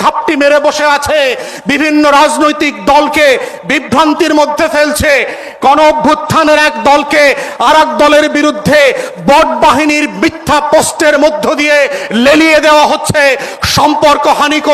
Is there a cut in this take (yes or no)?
no